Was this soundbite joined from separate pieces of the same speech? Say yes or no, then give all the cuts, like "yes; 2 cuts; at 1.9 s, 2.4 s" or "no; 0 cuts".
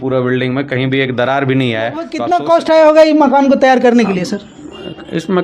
yes; 1 cut; at 2.2 s